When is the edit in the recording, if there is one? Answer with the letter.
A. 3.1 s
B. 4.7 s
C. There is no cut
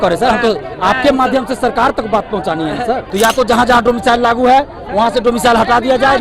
A